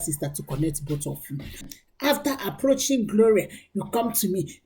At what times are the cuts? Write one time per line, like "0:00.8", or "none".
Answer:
0:01.8

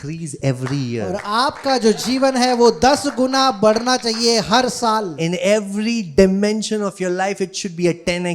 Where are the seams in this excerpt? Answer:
none

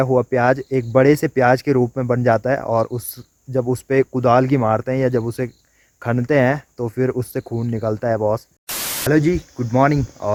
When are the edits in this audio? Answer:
none

